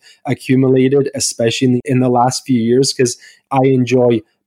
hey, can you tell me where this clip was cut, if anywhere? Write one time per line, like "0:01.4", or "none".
0:01.8